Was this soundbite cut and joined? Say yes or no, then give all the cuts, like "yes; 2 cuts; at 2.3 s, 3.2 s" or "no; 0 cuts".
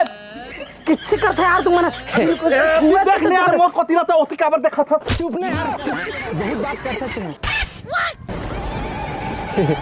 no; 0 cuts